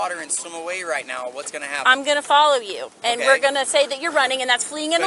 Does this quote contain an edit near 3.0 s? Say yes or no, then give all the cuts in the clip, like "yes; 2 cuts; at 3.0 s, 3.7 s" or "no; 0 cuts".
no; 0 cuts